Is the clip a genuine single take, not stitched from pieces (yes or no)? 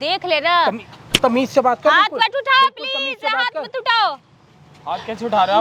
yes